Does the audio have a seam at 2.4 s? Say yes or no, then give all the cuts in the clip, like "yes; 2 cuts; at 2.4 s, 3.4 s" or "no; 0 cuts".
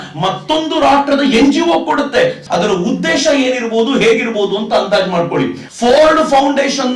yes; 2 cuts; at 2.4 s, 5.6 s